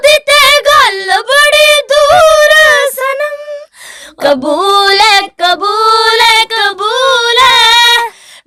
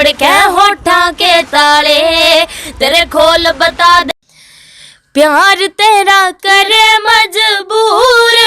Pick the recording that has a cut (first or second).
second